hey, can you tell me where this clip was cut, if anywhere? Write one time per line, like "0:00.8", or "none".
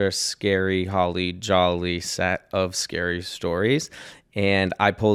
none